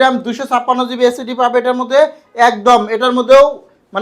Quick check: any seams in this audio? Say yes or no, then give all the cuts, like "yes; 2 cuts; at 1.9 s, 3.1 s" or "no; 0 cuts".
no; 0 cuts